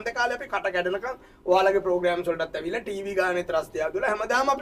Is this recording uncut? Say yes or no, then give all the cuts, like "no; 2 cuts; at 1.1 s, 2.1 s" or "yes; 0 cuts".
yes; 0 cuts